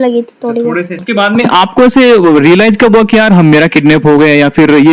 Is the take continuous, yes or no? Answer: yes